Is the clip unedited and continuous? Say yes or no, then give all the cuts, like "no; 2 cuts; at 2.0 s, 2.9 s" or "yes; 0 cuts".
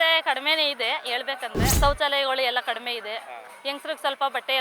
no; 1 cut; at 1.8 s